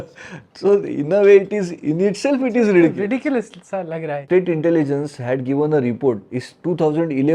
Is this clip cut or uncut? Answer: cut